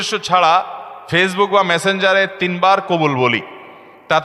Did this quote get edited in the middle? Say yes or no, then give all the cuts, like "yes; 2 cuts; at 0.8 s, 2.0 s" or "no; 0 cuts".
no; 0 cuts